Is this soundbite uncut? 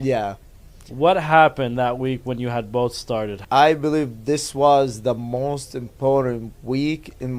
no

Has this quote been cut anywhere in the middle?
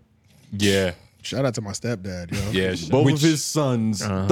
yes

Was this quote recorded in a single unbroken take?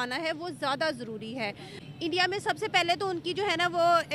no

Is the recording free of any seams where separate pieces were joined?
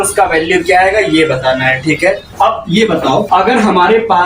no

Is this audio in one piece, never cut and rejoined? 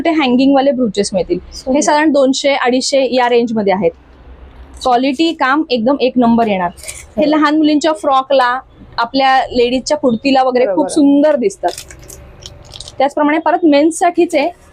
yes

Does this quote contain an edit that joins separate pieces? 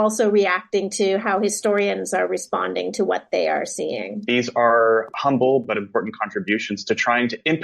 yes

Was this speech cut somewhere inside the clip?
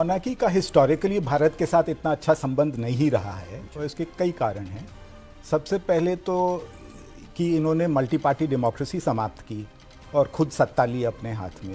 no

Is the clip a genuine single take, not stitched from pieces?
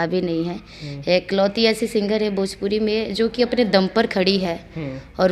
yes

